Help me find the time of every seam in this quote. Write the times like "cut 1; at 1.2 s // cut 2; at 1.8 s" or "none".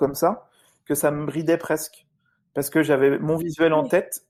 none